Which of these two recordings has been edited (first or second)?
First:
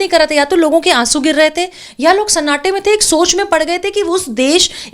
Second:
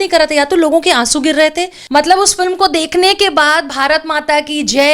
second